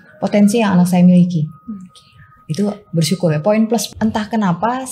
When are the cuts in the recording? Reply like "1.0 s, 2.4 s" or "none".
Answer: 3.9 s